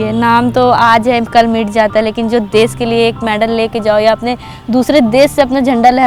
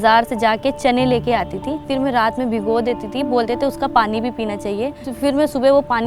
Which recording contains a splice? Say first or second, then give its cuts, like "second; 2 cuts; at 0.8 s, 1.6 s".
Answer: second; 2 cuts; at 1.8 s, 5.0 s